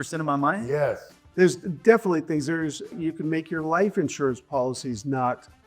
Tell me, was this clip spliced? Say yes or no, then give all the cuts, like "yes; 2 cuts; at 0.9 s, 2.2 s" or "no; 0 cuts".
yes; 2 cuts; at 1.2 s, 2.9 s